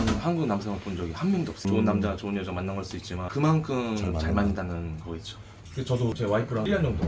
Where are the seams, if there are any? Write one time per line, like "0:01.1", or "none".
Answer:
0:01.5
0:05.5